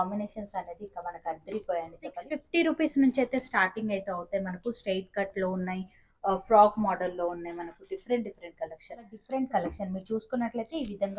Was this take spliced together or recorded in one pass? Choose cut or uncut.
cut